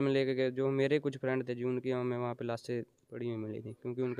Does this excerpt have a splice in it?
no; 0 cuts

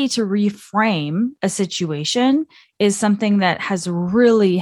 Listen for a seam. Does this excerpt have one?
no; 0 cuts

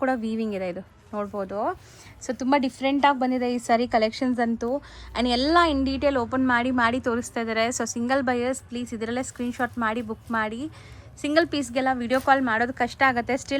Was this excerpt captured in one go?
yes; 0 cuts

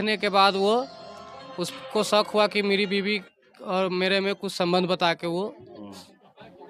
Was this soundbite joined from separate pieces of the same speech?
no; 0 cuts

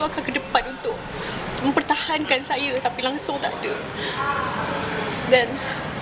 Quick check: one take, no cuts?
yes; 0 cuts

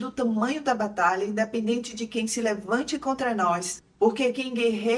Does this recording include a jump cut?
yes; 1 cut; at 3.8 s

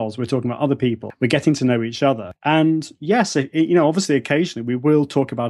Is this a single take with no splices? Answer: no; 2 cuts; at 1.1 s, 2.3 s

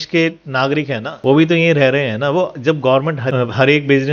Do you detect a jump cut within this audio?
no; 0 cuts

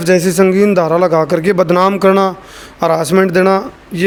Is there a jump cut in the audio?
no; 0 cuts

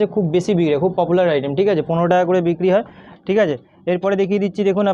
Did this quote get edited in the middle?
no; 0 cuts

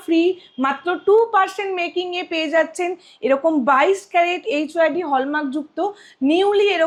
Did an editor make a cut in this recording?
no; 0 cuts

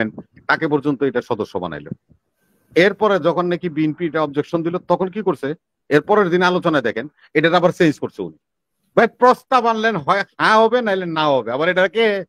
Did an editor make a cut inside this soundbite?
no; 0 cuts

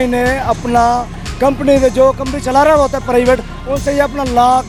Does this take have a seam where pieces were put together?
no; 0 cuts

